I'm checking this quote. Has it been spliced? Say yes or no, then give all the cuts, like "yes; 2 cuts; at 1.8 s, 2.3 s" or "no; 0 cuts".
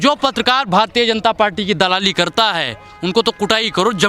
no; 0 cuts